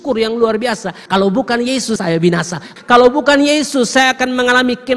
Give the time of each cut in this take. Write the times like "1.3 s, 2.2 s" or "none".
0.9 s, 2.3 s